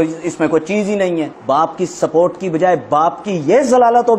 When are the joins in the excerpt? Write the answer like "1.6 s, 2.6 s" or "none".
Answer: 1.3 s